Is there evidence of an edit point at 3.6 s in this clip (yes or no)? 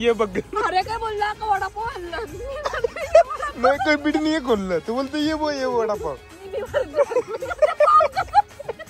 no